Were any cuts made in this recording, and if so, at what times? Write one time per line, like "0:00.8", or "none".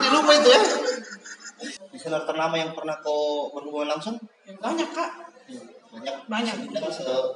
0:01.7